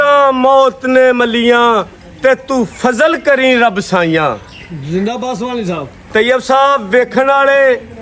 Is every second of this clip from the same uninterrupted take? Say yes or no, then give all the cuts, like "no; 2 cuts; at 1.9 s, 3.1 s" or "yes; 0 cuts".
yes; 0 cuts